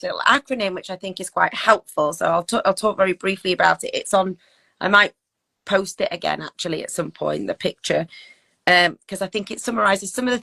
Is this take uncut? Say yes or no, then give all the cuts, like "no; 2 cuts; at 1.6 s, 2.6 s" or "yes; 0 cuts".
no; 1 cut; at 8.5 s